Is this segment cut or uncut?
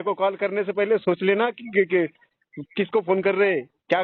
uncut